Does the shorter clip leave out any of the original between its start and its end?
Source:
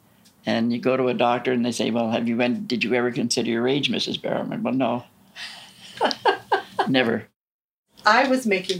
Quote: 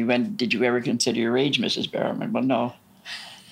no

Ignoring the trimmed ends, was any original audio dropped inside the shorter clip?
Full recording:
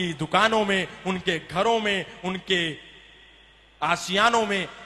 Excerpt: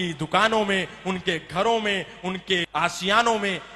yes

